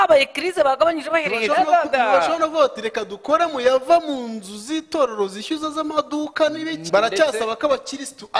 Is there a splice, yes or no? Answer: yes